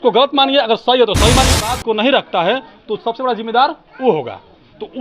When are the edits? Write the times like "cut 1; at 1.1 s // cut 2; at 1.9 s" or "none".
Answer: cut 1; at 1.6 s